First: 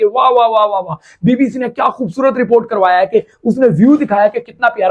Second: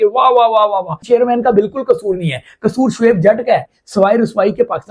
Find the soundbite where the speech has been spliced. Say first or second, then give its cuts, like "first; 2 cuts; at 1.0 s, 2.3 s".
second; 2 cuts; at 1.0 s, 3.7 s